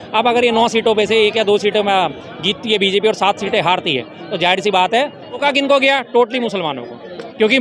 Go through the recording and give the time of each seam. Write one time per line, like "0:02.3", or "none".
0:05.4